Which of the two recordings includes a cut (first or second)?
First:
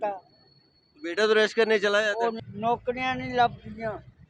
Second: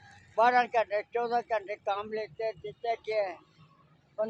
first